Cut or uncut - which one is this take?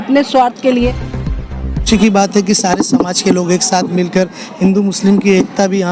cut